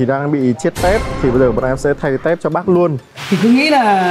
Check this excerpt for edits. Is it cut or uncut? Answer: cut